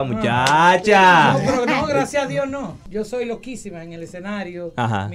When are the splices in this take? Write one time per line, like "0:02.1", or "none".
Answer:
0:02.7